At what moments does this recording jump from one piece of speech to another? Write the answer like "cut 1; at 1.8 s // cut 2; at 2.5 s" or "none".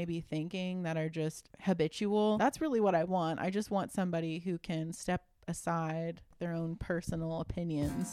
cut 1; at 1.5 s // cut 2; at 2.4 s // cut 3; at 6.3 s